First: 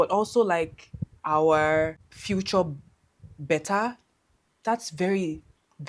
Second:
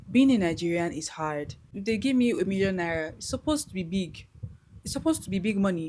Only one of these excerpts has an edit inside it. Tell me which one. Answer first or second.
second